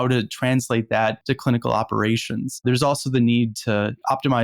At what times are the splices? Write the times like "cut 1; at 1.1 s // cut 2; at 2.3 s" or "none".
cut 1; at 2.6 s